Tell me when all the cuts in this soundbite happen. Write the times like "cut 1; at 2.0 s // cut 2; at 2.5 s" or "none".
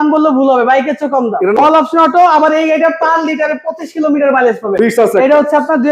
cut 1; at 1.6 s // cut 2; at 4.7 s